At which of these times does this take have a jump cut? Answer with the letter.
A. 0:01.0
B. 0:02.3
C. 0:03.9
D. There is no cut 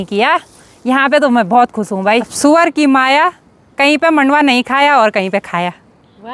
B